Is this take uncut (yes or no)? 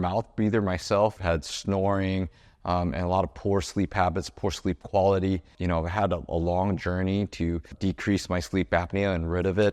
no